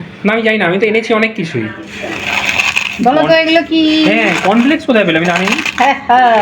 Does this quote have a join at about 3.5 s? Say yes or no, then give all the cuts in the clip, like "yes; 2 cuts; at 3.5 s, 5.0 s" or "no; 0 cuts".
no; 1 cut; at 1.9 s